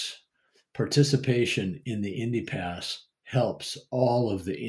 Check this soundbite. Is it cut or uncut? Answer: uncut